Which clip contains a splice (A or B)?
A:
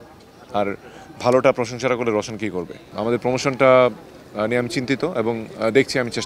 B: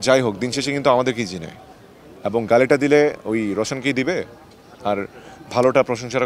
A